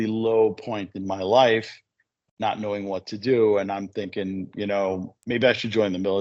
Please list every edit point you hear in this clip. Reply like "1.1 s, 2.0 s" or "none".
5.1 s